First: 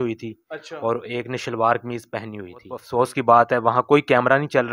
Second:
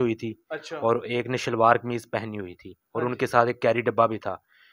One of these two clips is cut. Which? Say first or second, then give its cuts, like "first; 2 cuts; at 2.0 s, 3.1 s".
first; 1 cut; at 2.8 s